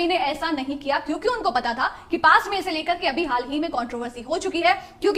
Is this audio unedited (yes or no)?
yes